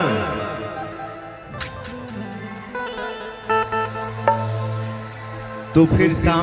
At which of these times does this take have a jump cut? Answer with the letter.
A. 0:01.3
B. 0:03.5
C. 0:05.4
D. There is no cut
D